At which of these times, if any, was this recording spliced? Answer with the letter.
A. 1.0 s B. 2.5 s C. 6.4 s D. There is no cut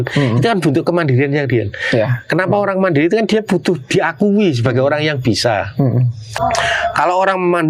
C